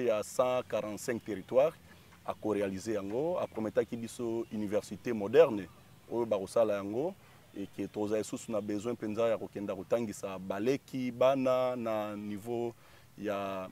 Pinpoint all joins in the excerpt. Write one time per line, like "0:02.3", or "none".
none